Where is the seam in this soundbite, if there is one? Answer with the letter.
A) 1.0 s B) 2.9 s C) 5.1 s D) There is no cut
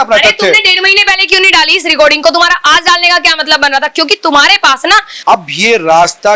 C